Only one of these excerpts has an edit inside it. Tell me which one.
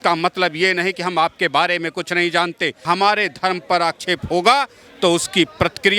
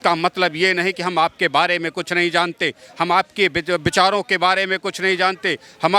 first; 1 cut; at 2.8 s

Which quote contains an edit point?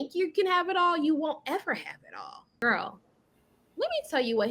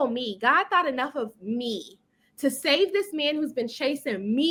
first; 1 cut; at 2.6 s

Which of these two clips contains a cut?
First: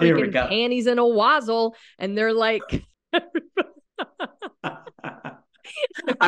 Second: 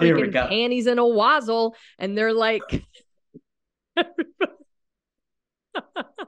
first; 2 cuts; at 3.0 s, 3.8 s

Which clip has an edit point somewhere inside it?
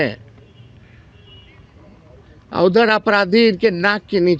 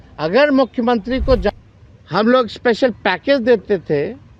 second; 1 cut; at 1.5 s

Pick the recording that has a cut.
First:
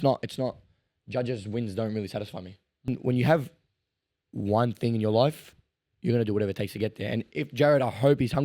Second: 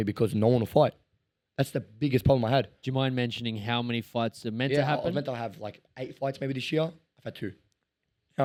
first; 1 cut; at 2.9 s

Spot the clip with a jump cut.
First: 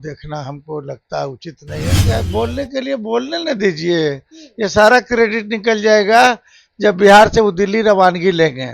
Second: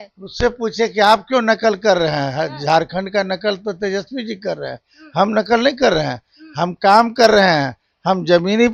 first; 1 cut; at 2.0 s

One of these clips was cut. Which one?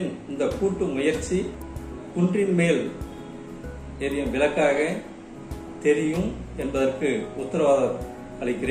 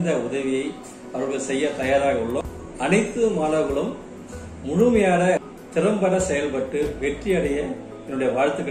second; 1 cut; at 2.5 s

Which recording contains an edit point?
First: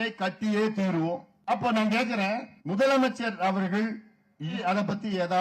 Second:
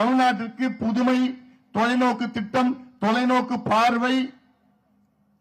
first; 3 cuts; at 1.3 s, 2.5 s, 4.6 s

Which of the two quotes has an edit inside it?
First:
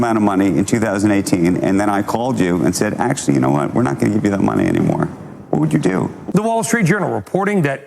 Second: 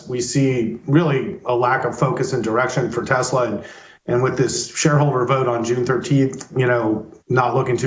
first; 1 cut; at 6.2 s

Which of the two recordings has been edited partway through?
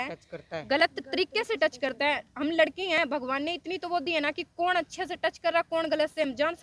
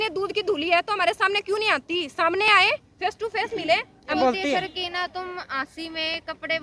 second; 1 cut; at 4.2 s

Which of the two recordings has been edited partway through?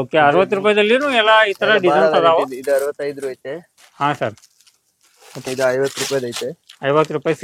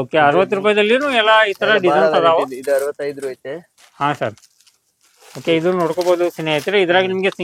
first; 1 cut; at 5.4 s

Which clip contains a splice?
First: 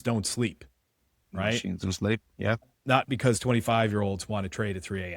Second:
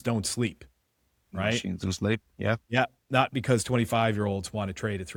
first; 1 cut; at 2.7 s

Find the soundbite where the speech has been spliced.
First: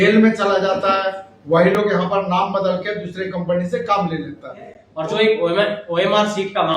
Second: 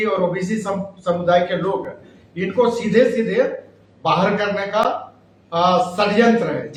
first; 1 cut; at 4.9 s

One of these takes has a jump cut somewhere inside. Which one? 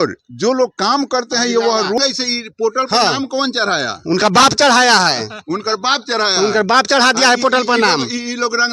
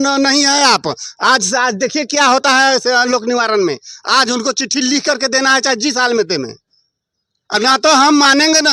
first; 1 cut; at 2.0 s

